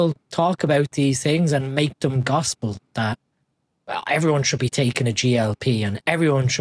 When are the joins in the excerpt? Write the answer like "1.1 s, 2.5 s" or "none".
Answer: none

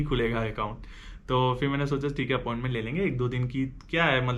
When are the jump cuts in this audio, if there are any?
none

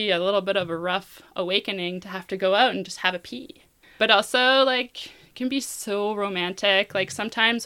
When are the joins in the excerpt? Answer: 4.0 s

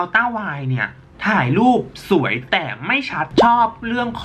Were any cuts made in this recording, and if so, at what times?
3.2 s

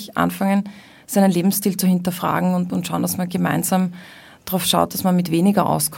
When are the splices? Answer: none

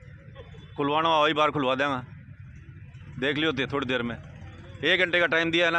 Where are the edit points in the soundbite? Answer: none

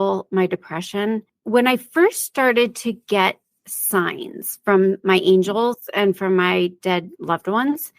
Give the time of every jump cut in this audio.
1.3 s

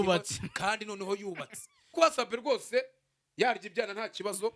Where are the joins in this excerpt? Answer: 1.9 s

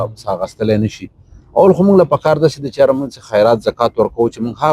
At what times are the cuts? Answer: none

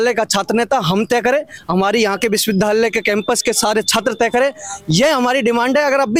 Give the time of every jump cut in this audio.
none

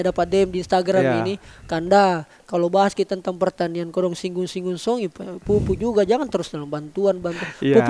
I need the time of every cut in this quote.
none

